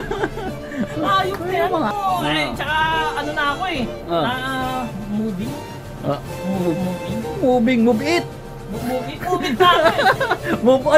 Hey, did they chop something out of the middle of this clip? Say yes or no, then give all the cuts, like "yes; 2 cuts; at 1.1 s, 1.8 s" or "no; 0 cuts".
yes; 1 cut; at 1.9 s